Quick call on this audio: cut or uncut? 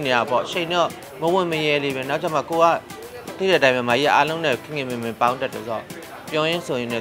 uncut